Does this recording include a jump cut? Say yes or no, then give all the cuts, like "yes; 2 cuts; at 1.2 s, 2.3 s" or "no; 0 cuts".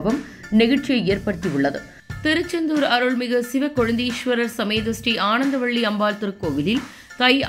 yes; 1 cut; at 2.0 s